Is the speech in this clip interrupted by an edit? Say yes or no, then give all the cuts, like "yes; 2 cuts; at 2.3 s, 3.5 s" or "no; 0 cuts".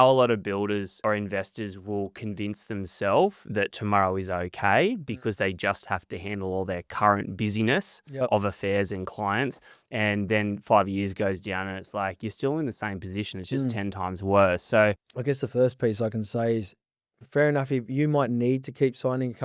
yes; 2 cuts; at 0.9 s, 15.1 s